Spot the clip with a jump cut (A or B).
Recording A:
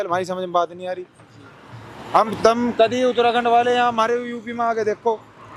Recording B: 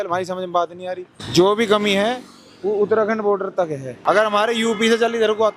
B